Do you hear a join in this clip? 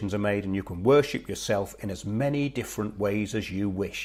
no; 0 cuts

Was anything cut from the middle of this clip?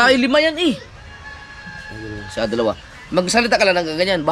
no; 0 cuts

